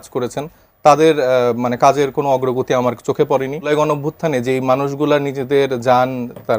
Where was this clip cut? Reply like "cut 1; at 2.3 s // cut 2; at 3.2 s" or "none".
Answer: cut 1; at 3.7 s